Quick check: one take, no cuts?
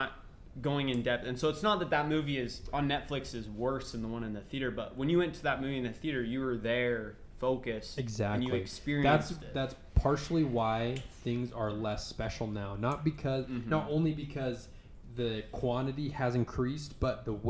yes; 0 cuts

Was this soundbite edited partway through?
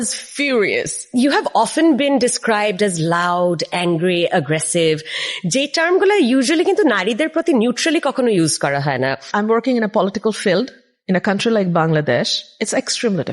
yes; 3 cuts; at 0.9 s, 9.3 s, 12.4 s

